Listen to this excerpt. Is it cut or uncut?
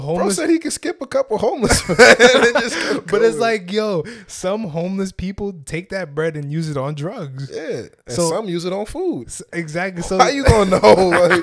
uncut